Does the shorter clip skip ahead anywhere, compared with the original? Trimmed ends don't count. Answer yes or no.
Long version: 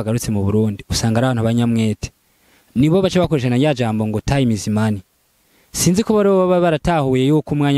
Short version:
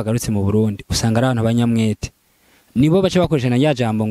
no